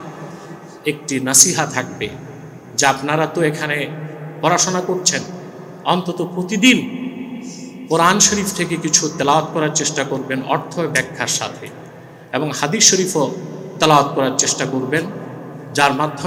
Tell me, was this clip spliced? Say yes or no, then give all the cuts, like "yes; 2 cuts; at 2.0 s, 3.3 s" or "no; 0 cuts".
no; 0 cuts